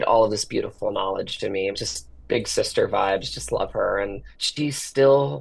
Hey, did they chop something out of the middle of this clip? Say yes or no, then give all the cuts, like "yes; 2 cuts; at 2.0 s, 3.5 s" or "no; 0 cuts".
no; 0 cuts